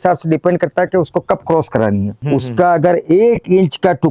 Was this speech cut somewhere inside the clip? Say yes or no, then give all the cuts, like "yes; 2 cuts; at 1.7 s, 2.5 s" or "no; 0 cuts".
yes; 1 cut; at 2.2 s